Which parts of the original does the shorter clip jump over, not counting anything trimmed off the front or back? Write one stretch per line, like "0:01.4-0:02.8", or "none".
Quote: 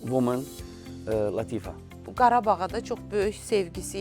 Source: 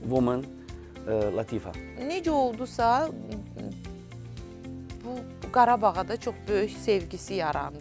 0:01.9-0:05.3